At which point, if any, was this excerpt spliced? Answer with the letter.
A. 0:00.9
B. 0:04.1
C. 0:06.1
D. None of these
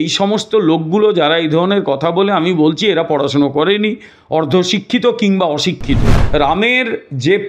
C